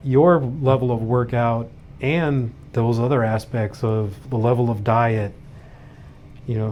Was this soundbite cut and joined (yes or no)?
no